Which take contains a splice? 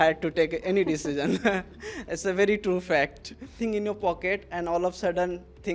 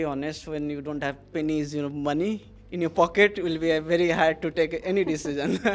first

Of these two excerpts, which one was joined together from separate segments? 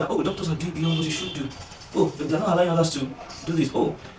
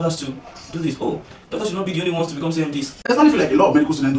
second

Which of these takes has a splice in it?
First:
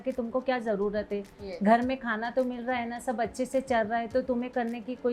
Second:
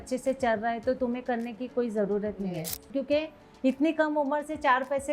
second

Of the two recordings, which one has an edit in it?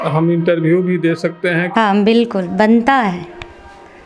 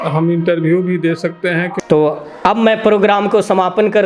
first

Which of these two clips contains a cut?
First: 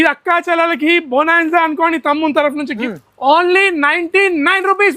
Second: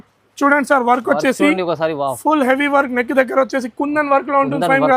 first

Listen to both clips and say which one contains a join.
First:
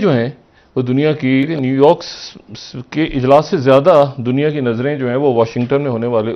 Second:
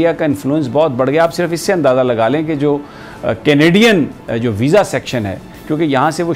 first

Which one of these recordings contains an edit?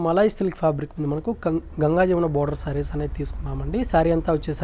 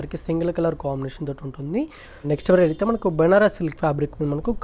second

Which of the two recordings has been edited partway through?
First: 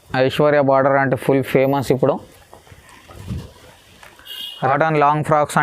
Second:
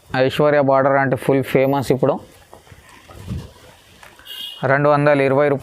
first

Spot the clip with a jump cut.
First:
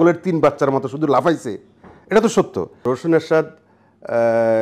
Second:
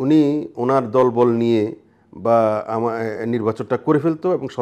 first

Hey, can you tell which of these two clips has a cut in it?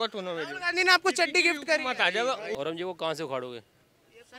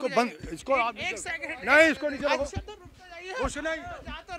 first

